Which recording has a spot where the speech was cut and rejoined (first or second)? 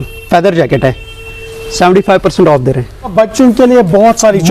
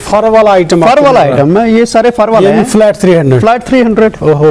first